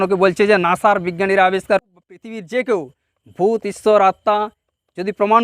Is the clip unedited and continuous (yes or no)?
no